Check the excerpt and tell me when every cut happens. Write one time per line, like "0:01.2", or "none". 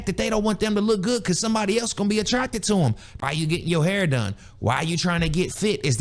0:03.2